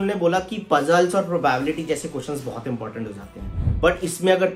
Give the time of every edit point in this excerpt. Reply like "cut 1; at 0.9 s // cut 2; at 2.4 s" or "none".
cut 1; at 3.6 s